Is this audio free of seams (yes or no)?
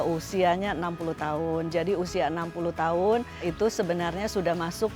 no